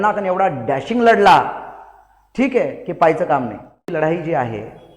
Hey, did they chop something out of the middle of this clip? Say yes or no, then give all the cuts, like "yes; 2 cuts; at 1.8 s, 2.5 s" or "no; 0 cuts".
yes; 1 cut; at 3.8 s